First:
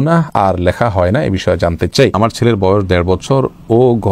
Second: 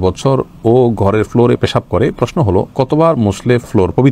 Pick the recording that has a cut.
first; 1 cut; at 2.1 s

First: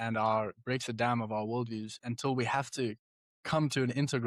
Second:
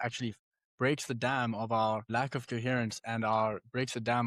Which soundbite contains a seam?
second; 1 cut; at 2.1 s

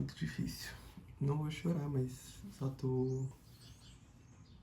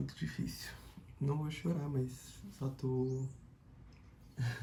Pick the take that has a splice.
first; 1 cut; at 3.4 s

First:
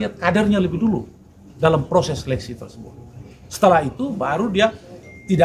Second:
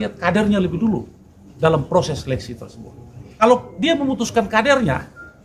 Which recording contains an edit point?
second; 1 cut; at 3.3 s

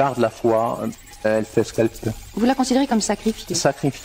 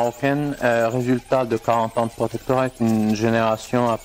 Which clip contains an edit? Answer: first; 1 cut; at 1.2 s

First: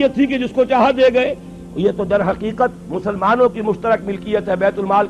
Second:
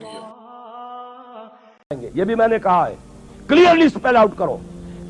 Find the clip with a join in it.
second; 1 cut; at 2.0 s

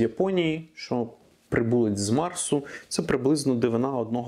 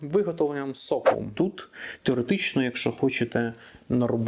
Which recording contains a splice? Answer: second; 1 cut; at 1.3 s

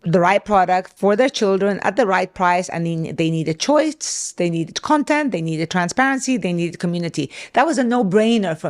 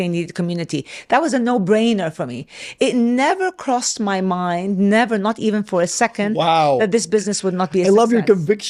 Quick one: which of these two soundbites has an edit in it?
first; 1 cut; at 0.9 s

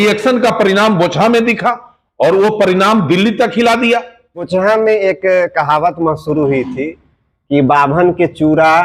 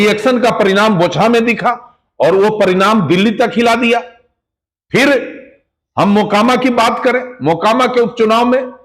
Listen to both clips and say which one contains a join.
first; 1 cut; at 4.5 s

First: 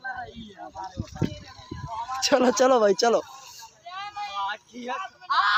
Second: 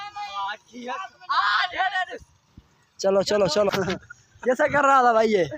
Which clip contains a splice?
second; 1 cut; at 3.7 s

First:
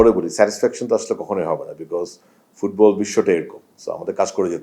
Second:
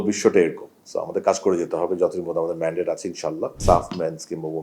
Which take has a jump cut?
second; 1 cut; at 3.6 s

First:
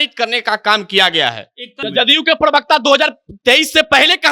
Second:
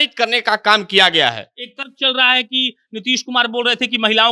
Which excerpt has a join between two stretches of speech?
first; 1 cut; at 1.8 s

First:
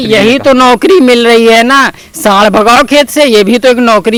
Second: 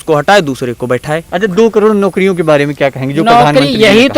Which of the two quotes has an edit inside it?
second; 1 cut; at 1.3 s

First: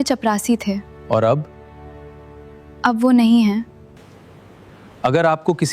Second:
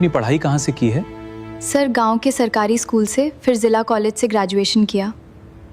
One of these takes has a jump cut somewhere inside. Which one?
first; 1 cut; at 4.1 s

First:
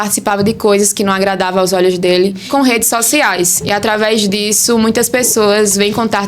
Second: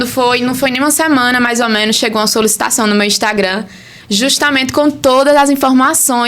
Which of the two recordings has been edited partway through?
first; 1 cut; at 2.4 s

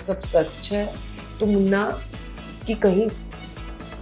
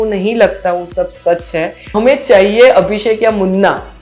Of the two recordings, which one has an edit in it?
second; 1 cut; at 1.9 s

